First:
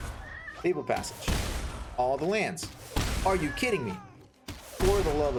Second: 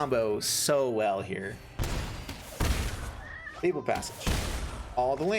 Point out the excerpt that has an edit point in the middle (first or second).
second